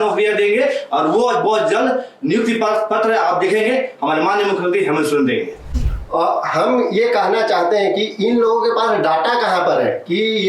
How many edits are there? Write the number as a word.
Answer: one